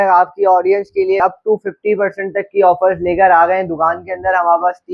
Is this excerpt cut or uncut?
cut